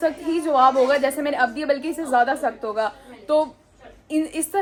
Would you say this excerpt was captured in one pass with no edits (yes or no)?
yes